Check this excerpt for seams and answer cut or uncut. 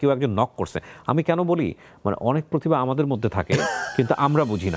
uncut